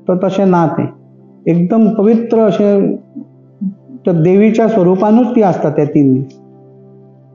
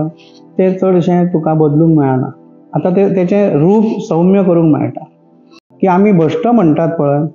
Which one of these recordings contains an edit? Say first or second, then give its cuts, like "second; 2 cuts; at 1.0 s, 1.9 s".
second; 1 cut; at 5.7 s